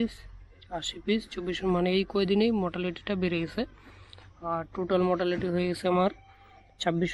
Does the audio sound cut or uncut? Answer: uncut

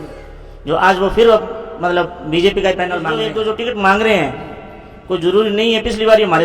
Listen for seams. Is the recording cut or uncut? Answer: cut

